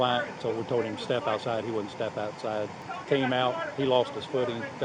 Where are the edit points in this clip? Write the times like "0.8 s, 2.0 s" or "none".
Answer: 2.9 s